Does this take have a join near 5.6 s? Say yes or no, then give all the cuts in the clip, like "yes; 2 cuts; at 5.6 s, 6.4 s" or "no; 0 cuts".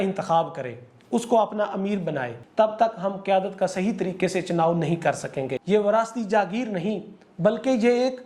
yes; 2 cuts; at 2.4 s, 5.6 s